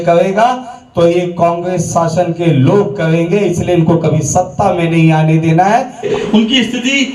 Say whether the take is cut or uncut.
uncut